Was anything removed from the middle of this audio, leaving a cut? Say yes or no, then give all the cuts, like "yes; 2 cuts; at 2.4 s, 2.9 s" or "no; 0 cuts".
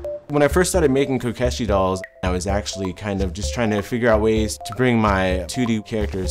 yes; 1 cut; at 2.2 s